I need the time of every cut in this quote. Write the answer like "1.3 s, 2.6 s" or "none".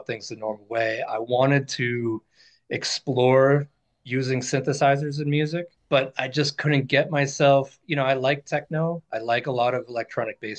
5.7 s